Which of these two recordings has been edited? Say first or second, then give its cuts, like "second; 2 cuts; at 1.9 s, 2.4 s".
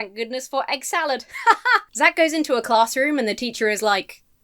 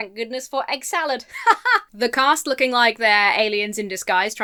first; 1 cut; at 1.9 s